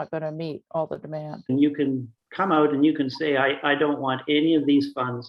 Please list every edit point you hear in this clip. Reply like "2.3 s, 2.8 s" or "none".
1.5 s

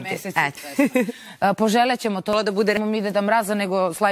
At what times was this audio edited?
2.3 s

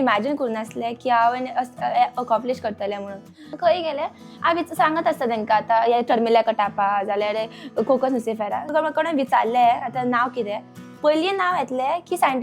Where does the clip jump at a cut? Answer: 3.4 s, 8.7 s

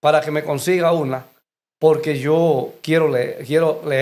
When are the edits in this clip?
none

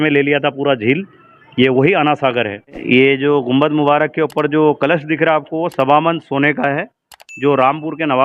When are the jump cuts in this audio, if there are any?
2.8 s

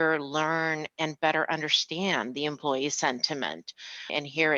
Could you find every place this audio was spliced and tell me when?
none

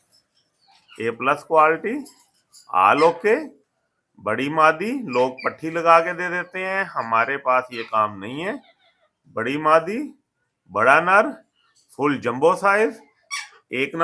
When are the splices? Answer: none

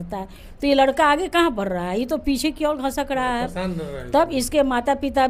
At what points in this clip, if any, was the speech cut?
none

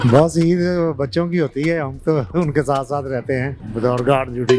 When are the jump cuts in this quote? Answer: 3.6 s

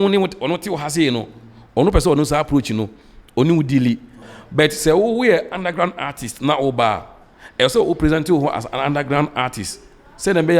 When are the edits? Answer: 4.2 s

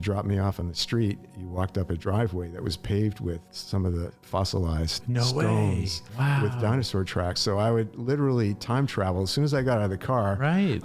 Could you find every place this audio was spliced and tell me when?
none

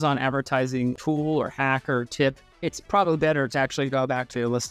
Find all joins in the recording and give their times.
1.0 s, 2.5 s

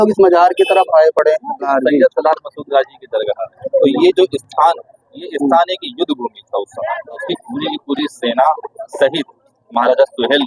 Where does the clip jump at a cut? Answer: 1.7 s, 3.5 s, 7.3 s

